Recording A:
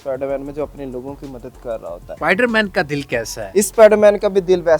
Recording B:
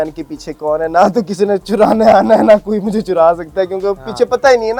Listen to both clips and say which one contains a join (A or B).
A